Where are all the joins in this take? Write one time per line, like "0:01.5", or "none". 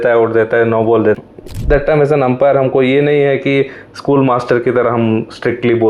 0:01.2